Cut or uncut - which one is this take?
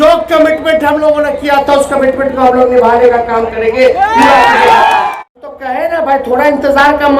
cut